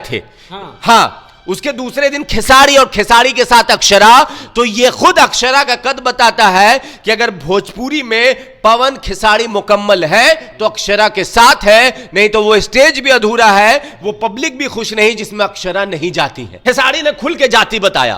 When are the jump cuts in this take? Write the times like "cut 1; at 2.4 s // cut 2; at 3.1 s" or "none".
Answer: cut 1; at 16.6 s